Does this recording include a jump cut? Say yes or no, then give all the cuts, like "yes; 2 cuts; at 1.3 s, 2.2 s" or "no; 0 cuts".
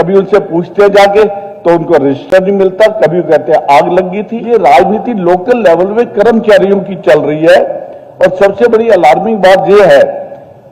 yes; 1 cut; at 4.3 s